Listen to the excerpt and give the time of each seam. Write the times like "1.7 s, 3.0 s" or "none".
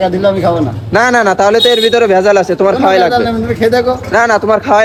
none